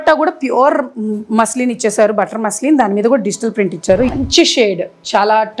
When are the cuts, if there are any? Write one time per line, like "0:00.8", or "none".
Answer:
0:04.1